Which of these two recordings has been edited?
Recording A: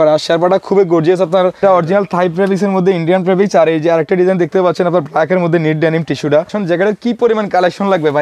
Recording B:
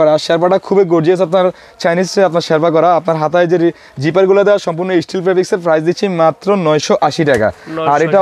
A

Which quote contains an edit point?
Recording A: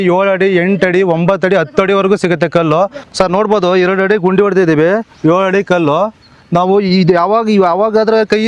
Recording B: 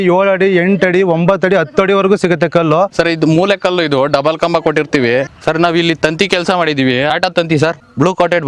B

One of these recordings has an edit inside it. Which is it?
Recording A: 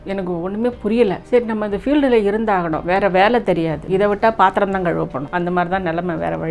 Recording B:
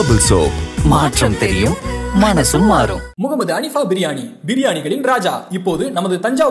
A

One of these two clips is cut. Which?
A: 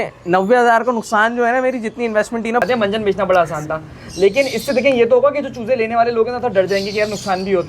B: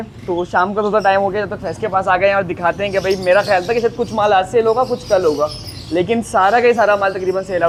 A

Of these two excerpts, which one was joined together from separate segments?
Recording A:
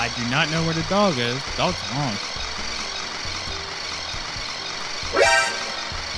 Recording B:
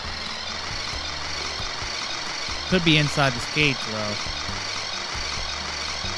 B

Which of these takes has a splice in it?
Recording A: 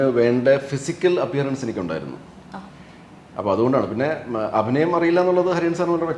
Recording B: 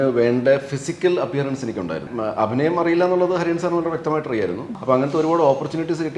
B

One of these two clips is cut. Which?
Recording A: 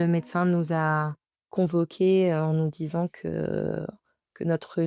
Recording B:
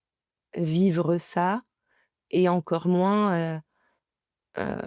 A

